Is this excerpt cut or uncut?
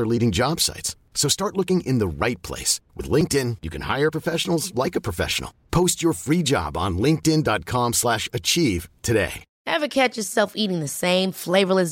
cut